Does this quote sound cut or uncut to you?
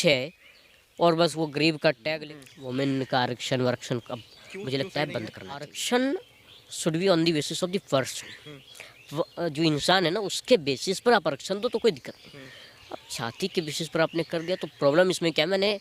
cut